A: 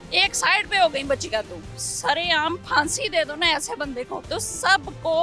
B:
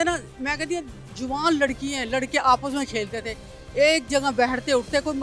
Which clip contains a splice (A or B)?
A